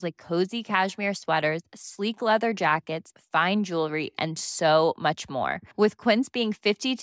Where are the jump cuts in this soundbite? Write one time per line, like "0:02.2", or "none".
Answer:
none